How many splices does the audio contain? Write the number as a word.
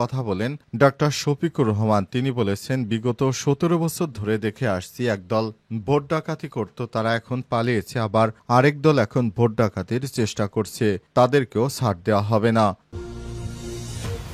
one